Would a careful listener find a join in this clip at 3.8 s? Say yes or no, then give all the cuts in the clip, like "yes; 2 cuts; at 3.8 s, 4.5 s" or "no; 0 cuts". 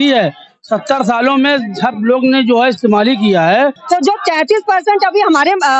yes; 1 cut; at 3.8 s